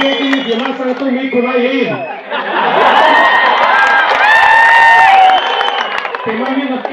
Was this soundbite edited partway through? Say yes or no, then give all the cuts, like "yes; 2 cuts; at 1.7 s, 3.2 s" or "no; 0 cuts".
no; 0 cuts